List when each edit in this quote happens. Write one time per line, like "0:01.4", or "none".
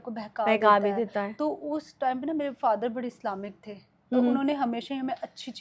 none